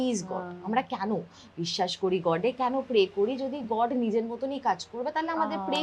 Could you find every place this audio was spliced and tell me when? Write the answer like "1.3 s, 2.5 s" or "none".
none

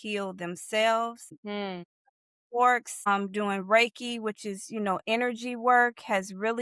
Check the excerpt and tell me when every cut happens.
none

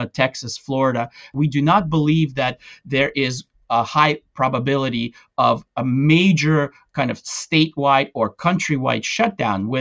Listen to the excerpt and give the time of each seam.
1.3 s

